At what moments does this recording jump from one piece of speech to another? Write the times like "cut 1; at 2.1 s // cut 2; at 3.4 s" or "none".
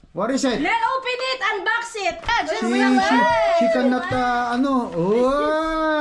cut 1; at 2.3 s